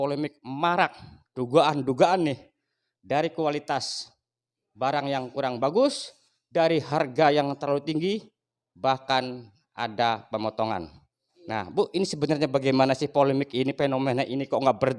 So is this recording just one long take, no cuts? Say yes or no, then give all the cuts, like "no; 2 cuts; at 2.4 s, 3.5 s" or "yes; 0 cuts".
yes; 0 cuts